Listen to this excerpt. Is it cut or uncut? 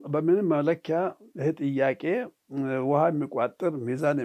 uncut